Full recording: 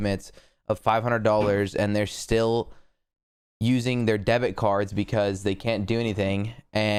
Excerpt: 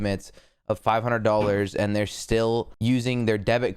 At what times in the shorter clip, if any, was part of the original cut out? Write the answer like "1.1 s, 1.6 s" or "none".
2.7 s